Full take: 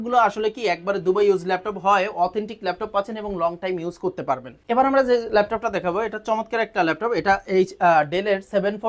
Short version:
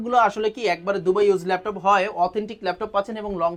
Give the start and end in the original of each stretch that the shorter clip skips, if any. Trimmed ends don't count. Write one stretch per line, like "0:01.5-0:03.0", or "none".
none